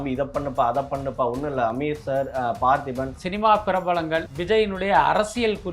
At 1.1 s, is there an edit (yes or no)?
no